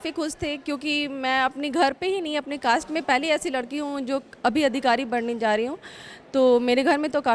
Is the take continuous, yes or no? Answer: yes